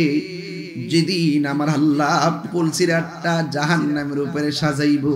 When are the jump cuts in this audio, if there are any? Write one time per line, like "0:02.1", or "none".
0:02.4